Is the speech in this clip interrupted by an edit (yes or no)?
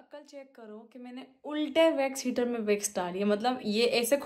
no